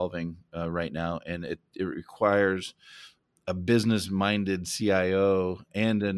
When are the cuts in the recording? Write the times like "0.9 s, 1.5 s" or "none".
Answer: none